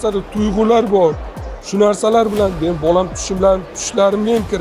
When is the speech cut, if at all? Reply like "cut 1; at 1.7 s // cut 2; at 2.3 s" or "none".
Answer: none

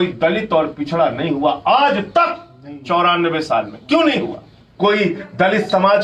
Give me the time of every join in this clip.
cut 1; at 4.6 s

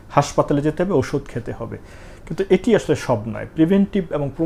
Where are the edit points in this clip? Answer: none

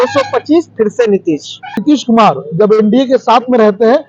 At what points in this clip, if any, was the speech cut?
cut 1; at 1.8 s

